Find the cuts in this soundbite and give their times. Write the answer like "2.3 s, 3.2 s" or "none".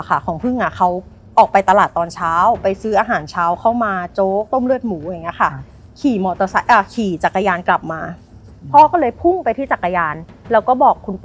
none